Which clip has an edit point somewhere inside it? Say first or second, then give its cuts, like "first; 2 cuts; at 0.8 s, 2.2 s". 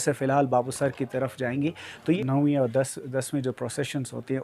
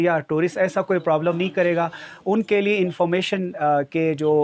first; 1 cut; at 2.2 s